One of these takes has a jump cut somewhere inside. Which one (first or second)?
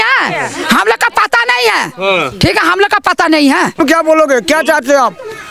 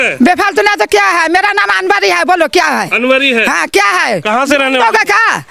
first